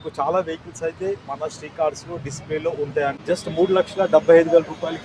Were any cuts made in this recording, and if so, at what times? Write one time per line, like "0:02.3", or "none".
0:03.2